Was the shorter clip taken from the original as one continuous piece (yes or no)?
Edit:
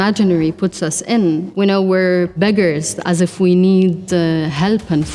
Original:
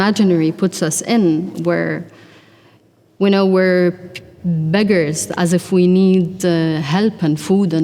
no